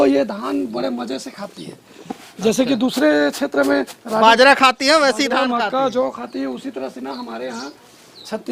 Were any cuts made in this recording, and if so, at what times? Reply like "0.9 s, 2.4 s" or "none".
none